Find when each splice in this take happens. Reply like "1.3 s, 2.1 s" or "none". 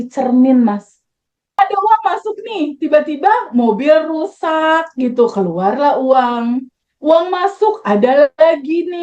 1.4 s